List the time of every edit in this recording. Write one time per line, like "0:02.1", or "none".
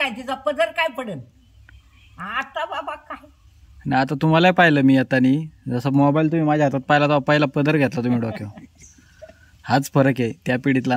none